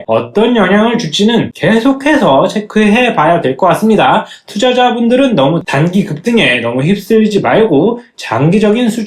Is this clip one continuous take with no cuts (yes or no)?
yes